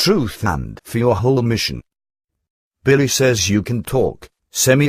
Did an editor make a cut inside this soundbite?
yes; 1 cut; at 1.0 s

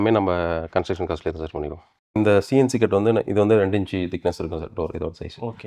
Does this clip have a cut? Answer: yes; 1 cut; at 2.1 s

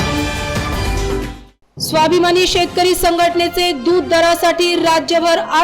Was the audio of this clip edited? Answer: no; 0 cuts

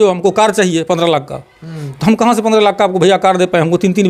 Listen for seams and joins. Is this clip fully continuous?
yes; 0 cuts

